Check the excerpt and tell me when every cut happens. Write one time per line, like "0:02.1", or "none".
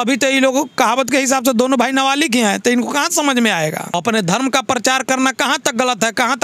0:03.9